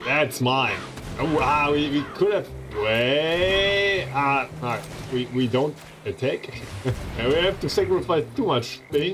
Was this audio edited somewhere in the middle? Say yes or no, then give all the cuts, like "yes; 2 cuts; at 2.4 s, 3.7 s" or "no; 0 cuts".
no; 0 cuts